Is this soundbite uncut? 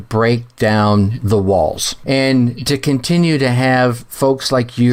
no; 1 cut; at 2.0 s

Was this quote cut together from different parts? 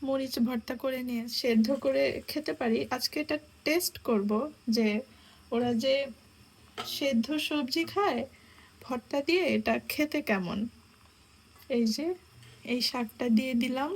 yes; 1 cut; at 1.3 s

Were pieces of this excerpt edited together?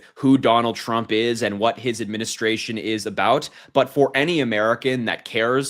no; 0 cuts

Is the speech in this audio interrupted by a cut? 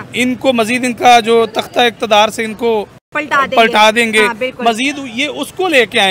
no; 0 cuts

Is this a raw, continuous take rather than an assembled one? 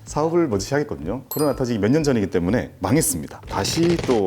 no; 1 cut; at 1.2 s

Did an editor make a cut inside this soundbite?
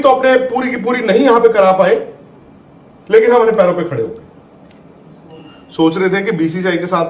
yes; 1 cut; at 5.5 s

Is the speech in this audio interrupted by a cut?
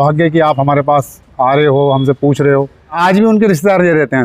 yes; 1 cut; at 3.0 s

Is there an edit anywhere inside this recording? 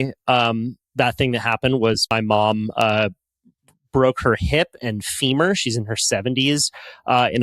yes; 1 cut; at 2.1 s

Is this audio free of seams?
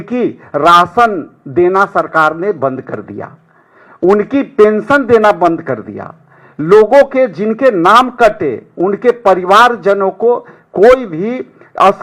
yes; 0 cuts

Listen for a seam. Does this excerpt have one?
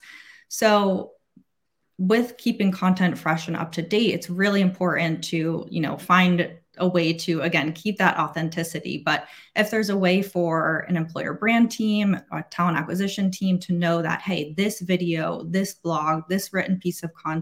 no; 0 cuts

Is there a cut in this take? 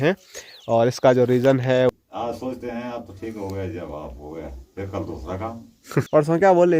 yes; 2 cuts; at 1.9 s, 6.0 s

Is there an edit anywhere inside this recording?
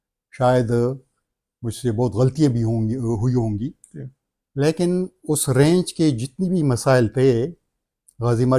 no; 0 cuts

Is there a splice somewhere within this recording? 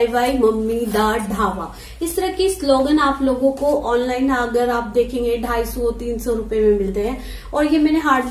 no; 0 cuts

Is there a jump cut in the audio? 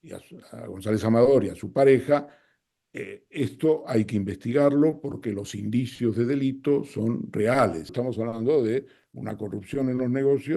yes; 1 cut; at 8.0 s

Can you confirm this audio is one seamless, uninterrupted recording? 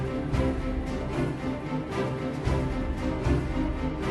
no; 1 cut; at 1.8 s

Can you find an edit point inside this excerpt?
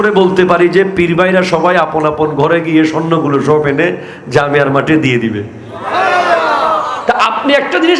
no; 0 cuts

